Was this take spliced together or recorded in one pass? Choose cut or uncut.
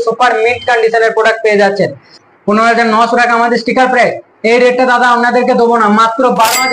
cut